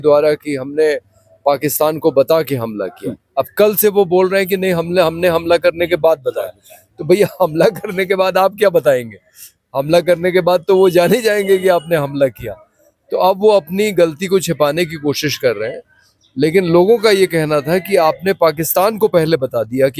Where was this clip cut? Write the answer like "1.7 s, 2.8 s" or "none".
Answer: none